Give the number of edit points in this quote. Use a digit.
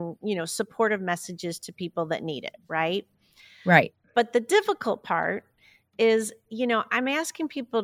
0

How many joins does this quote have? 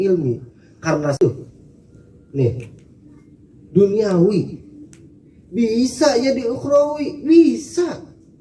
1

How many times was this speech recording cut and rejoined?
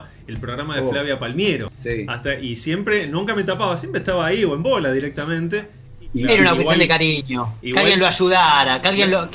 2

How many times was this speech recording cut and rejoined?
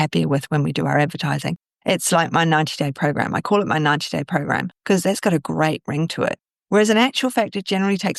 1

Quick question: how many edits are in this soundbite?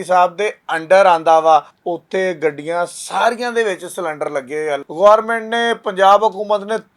2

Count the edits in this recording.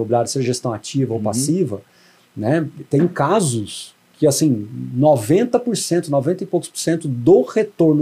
0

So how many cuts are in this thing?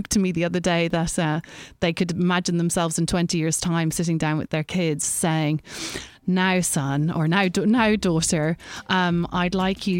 0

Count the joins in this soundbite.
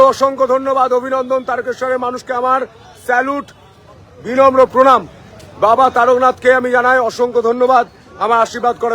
1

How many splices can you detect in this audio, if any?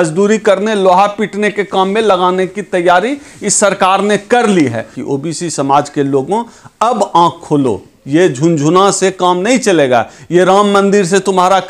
1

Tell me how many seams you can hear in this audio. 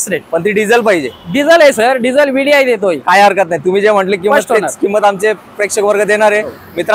0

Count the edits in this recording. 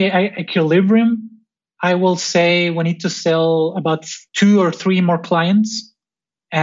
1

